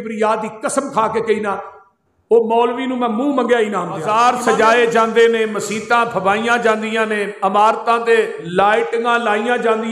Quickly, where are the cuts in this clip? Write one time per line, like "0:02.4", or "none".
0:04.1
0:08.4